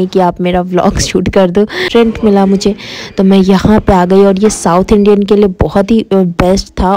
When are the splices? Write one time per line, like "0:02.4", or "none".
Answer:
0:01.8